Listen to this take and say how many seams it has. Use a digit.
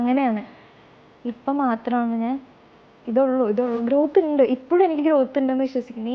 1